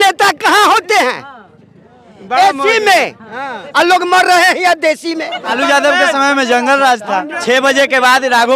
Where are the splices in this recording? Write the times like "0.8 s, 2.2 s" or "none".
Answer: 5.5 s, 7.3 s